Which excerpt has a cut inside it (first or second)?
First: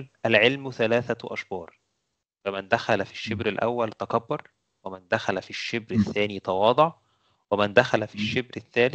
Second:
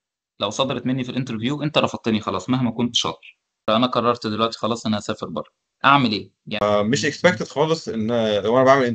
second